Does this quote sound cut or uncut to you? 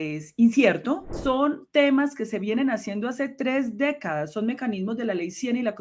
cut